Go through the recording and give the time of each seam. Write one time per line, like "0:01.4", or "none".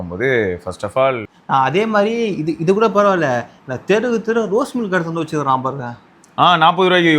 0:01.2